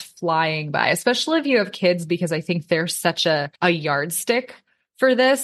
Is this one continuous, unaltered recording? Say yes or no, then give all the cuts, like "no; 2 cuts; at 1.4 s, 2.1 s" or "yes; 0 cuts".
no; 1 cut; at 3.5 s